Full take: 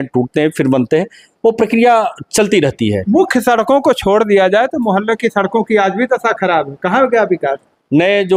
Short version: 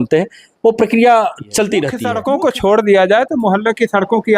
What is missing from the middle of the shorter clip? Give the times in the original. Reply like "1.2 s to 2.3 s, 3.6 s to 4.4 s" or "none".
2.8 s to 3.5 s